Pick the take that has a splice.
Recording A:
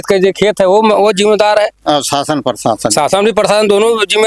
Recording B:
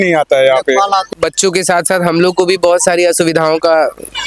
B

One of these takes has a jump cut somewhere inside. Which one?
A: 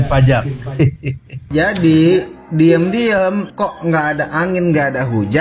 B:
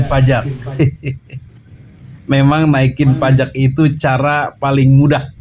A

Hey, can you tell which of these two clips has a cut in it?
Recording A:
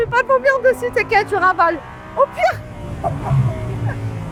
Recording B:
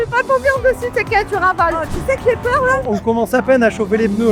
B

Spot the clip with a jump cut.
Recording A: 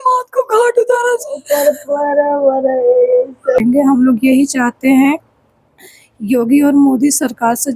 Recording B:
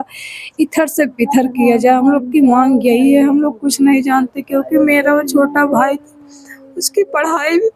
A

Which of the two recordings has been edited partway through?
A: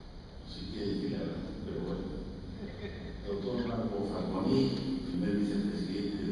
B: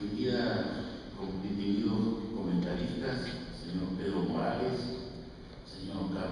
A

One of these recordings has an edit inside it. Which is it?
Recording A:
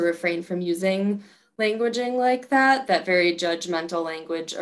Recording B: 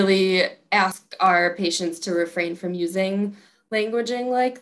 B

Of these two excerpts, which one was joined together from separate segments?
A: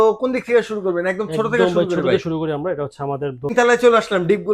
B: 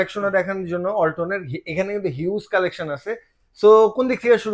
A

